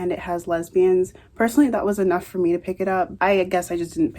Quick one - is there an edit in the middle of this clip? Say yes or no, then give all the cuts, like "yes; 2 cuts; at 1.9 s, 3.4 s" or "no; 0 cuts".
yes; 1 cut; at 3.1 s